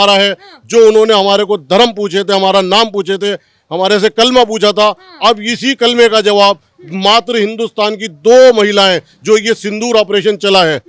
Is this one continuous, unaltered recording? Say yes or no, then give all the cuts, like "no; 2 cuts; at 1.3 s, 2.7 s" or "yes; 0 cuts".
yes; 0 cuts